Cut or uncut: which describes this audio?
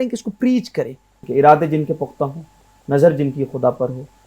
cut